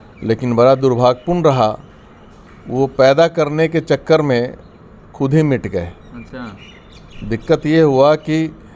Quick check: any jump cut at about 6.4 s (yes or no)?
no